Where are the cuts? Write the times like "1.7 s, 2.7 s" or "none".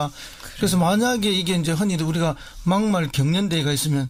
none